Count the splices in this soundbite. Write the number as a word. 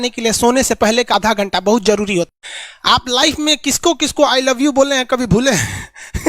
two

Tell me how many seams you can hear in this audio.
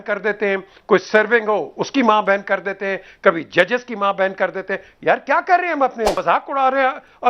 one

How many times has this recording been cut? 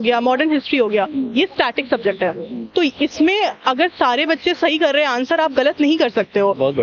zero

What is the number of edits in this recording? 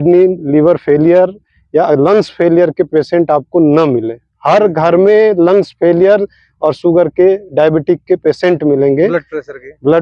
zero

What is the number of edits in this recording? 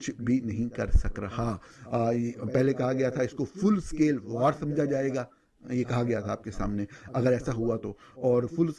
zero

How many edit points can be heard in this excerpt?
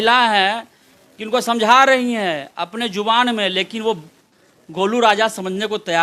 one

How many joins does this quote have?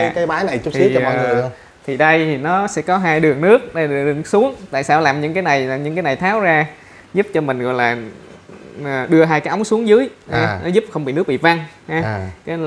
zero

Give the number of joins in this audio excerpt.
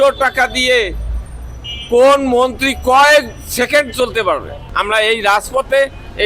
one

